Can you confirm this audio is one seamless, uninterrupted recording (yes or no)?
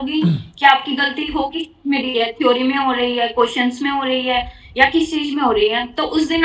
yes